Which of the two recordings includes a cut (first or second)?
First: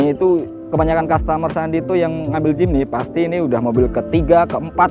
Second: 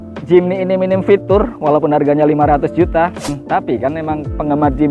second